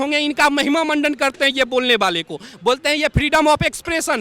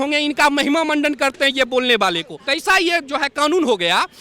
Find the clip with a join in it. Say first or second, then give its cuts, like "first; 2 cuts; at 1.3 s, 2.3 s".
second; 1 cut; at 2.4 s